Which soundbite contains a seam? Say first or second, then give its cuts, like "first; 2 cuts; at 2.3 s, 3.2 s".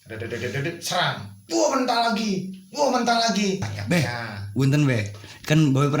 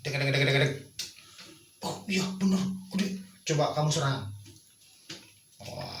first; 1 cut; at 3.7 s